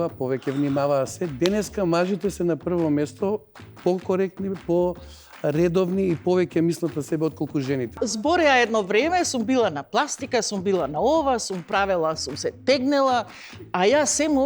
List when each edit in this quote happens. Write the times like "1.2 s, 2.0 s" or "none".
8.0 s